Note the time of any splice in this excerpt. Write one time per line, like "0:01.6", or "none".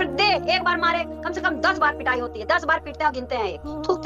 none

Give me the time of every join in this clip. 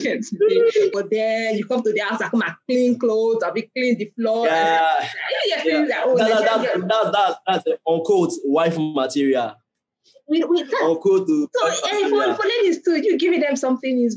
0:00.9

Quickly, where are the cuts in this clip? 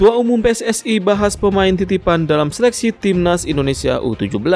none

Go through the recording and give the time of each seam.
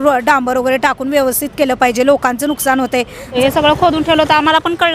0:03.2

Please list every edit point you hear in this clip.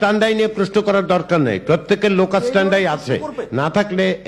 none

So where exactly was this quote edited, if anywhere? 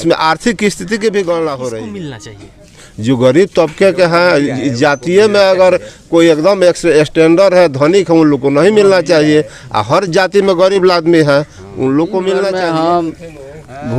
0:01.8
0:12.5

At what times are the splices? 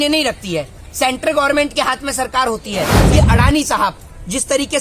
0:03.0

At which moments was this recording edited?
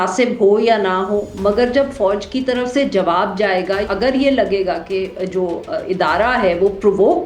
0:03.8

